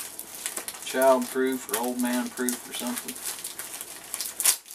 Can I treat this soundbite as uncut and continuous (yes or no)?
yes